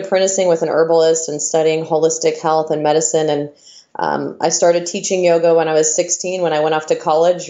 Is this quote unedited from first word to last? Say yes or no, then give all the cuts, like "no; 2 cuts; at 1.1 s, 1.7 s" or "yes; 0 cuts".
yes; 0 cuts